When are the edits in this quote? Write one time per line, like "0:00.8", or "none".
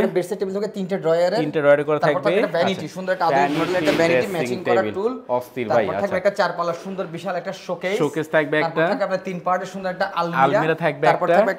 none